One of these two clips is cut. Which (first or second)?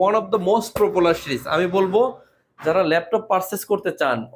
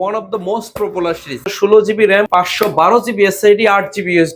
second